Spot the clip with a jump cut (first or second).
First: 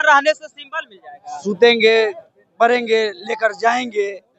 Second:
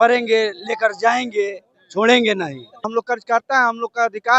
second